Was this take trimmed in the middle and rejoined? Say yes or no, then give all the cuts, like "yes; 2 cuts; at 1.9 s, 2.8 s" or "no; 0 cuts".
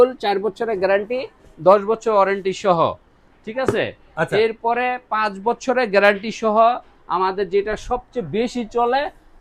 no; 0 cuts